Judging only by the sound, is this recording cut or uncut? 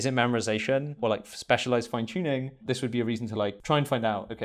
cut